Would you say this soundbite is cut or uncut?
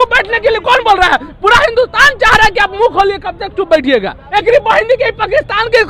cut